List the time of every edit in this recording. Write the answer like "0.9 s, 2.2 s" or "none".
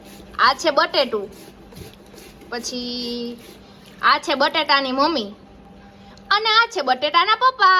none